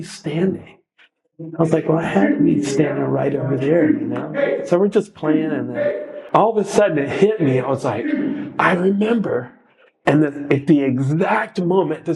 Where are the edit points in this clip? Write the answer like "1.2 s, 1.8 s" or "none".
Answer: 6.1 s